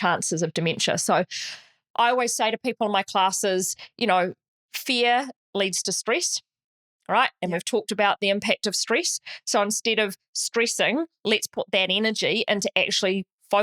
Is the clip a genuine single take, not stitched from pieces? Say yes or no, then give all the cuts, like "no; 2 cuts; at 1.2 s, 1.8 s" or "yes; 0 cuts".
yes; 0 cuts